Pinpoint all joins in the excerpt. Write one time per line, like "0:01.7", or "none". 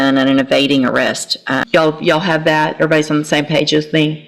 0:01.6